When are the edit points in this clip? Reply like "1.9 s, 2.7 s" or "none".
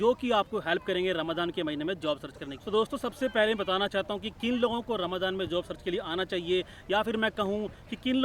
2.5 s